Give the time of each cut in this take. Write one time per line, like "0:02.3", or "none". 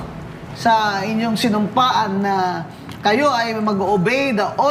none

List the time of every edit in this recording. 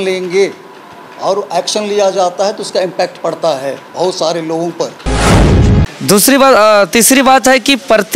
0:05.4

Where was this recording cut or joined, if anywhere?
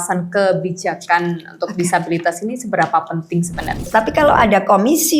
0:03.9

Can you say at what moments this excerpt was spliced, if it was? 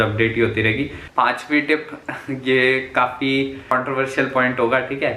0:01.0
0:03.7

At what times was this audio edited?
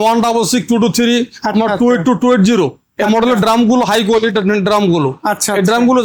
none

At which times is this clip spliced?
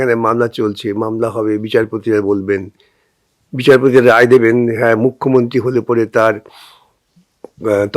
none

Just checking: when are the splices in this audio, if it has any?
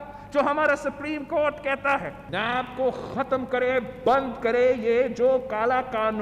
0:02.3

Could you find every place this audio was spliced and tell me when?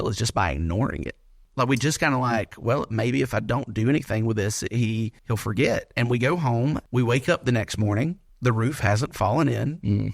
0:01.4
0:05.2
0:06.8
0:08.3

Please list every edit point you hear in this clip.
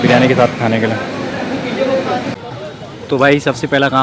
0:02.3

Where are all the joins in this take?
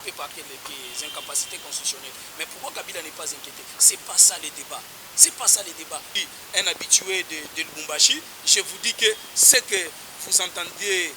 0:06.1

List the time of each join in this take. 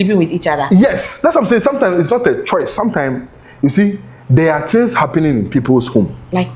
none

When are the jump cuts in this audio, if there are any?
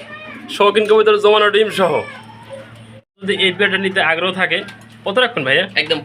0:03.2

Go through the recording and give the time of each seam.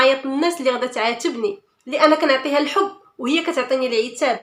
none

